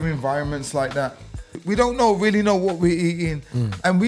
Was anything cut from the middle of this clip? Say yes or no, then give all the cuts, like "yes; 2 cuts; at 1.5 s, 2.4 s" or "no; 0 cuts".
yes; 1 cut; at 1.6 s